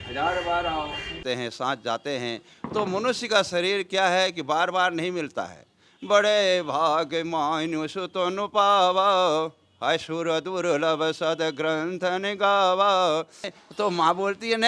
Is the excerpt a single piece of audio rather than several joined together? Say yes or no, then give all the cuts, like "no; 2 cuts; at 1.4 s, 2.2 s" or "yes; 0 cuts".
no; 2 cuts; at 1.2 s, 13.6 s